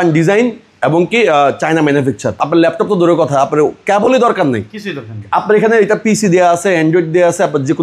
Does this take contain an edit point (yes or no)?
yes